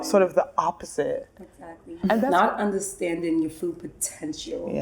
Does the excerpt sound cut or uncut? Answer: cut